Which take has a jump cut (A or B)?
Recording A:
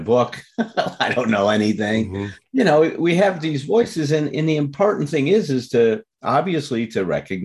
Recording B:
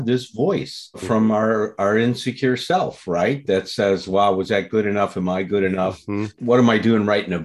B